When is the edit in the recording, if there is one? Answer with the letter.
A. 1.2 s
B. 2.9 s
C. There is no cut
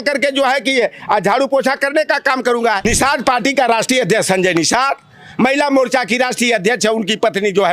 B